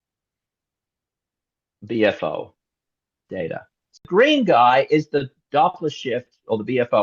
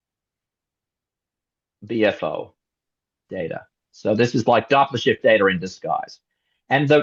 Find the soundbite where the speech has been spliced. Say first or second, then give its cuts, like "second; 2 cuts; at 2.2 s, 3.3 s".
first; 1 cut; at 4.0 s